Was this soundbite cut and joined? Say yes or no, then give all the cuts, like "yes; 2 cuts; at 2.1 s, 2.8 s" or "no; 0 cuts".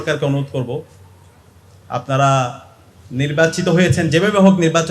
no; 0 cuts